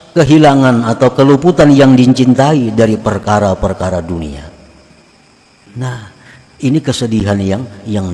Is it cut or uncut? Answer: cut